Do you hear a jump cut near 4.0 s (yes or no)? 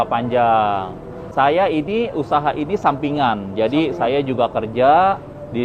no